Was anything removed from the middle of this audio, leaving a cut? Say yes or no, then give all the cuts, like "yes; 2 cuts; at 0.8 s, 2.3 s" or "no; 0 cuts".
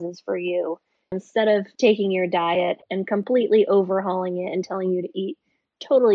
yes; 2 cuts; at 1.2 s, 2.9 s